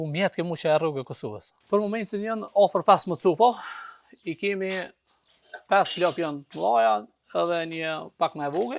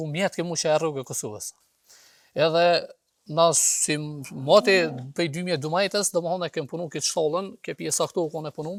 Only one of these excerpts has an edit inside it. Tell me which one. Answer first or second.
first